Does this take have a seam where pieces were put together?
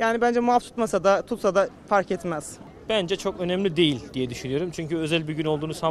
yes; 1 cut; at 2.5 s

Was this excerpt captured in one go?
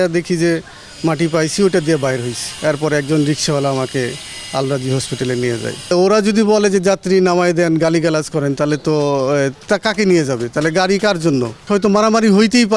no; 3 cuts; at 2.4 s, 5.9 s, 11.6 s

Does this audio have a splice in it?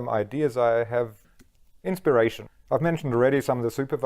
yes; 2 cuts; at 1.2 s, 2.5 s

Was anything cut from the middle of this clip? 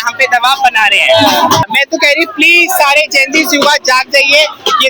yes; 1 cut; at 1.7 s

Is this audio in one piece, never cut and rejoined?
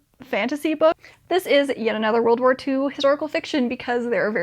no; 1 cut; at 1.0 s

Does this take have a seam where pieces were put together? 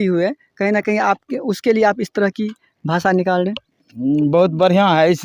no; 0 cuts

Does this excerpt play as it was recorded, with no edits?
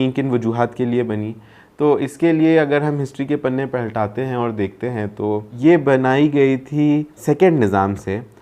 no; 2 cuts; at 5.5 s, 7.2 s

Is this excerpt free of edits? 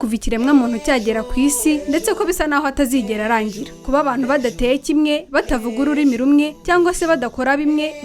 yes; 0 cuts

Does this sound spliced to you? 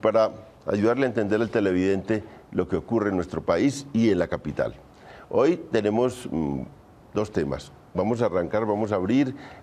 no; 0 cuts

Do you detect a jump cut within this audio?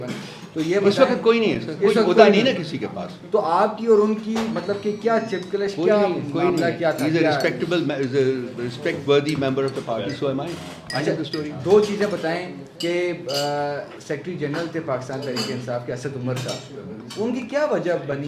no; 0 cuts

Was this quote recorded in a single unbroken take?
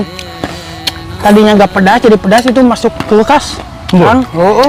yes; 0 cuts

